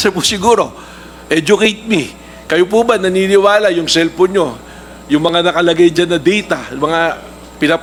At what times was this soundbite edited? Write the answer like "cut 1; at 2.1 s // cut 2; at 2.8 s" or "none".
none